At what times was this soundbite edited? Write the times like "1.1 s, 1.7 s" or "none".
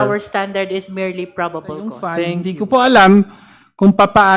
2.1 s